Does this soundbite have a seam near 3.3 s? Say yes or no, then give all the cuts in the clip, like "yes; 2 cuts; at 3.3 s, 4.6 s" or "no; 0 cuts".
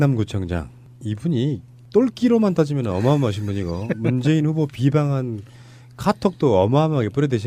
no; 0 cuts